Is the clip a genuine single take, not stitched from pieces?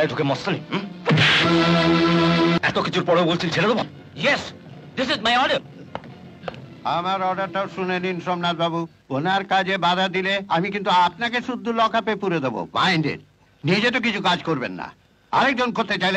no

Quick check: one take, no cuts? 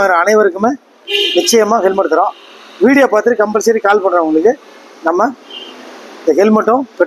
yes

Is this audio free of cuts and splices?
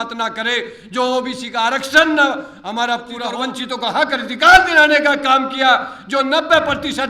no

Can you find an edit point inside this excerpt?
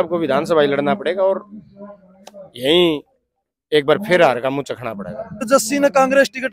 yes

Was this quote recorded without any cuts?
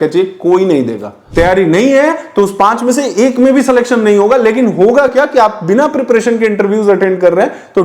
no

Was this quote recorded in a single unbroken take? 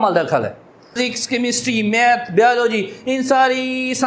no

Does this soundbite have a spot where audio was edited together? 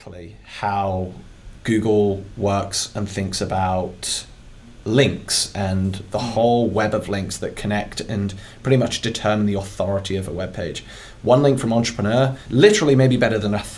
yes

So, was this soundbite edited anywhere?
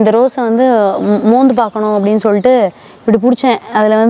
no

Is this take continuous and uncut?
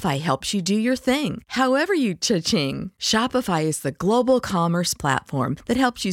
yes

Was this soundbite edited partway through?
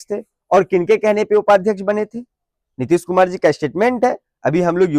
no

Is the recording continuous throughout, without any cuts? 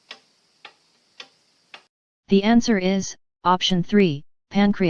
no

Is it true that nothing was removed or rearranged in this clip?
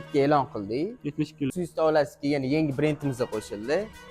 no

